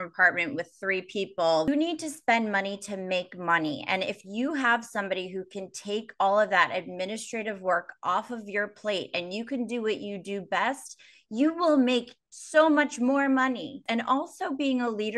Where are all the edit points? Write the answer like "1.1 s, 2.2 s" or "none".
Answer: 1.7 s, 13.8 s